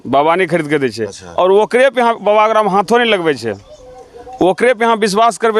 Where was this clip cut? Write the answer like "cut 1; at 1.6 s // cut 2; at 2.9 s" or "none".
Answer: none